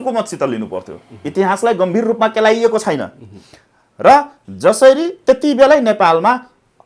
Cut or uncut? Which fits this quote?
uncut